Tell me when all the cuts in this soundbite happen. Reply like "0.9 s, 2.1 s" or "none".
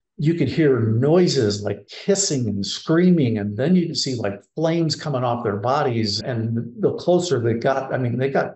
1.8 s, 6.2 s